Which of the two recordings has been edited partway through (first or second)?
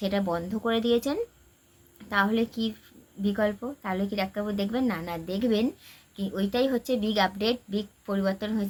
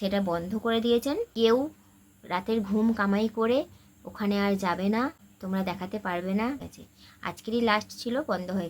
second